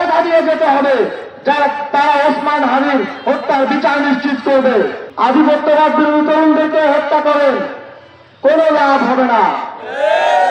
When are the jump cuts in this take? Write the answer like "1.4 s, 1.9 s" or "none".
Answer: 5.0 s